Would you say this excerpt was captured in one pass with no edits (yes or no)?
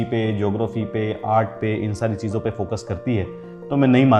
yes